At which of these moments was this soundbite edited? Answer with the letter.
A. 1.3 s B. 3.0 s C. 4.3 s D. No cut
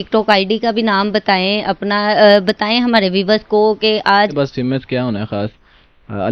C